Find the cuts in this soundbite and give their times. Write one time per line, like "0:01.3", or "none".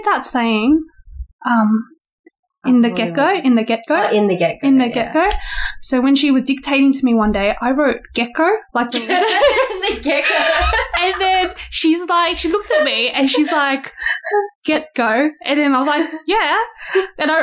none